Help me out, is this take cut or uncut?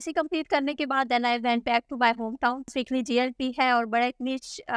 cut